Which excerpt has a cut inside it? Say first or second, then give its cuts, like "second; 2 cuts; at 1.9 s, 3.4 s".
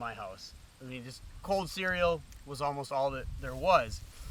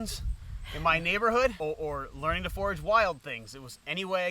second; 1 cut; at 1.6 s